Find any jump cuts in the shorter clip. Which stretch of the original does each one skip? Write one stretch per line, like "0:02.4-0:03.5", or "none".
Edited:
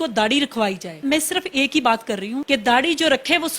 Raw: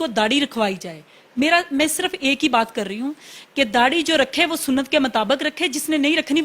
0:01.0-0:01.7
0:03.1-0:03.5